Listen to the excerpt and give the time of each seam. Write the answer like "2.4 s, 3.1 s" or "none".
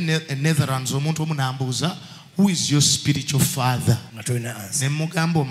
4.1 s